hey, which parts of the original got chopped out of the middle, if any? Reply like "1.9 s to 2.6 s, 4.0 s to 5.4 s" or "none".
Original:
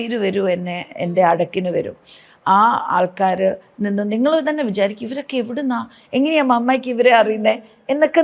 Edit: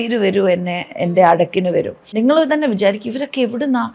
2.1 s to 4.1 s